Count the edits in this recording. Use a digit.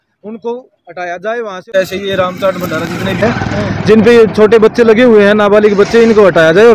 1